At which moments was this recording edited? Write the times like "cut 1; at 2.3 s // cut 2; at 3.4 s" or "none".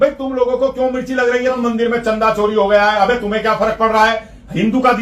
cut 1; at 1.6 s